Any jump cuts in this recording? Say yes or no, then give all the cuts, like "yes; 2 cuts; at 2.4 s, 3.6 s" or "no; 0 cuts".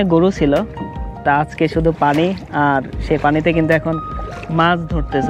no; 0 cuts